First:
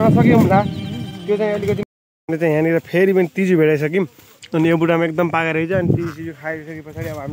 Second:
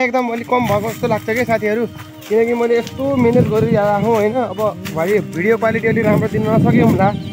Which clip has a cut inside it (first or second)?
first